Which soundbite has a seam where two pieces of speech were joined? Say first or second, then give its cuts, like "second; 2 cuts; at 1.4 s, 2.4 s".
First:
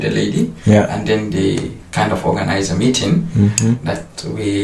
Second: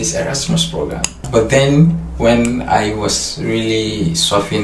second; 1 cut; at 1.2 s